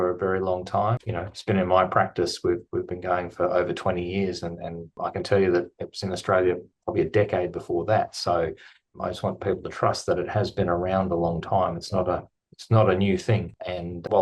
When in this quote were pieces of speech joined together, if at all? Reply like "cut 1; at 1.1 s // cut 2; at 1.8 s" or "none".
cut 1; at 1.1 s